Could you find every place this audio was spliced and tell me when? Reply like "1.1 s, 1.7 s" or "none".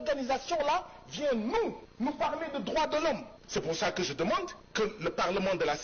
1.8 s, 3.3 s, 4.6 s